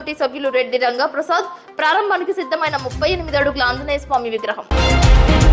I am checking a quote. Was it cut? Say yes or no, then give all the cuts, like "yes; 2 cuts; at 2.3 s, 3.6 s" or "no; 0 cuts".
yes; 1 cut; at 4.6 s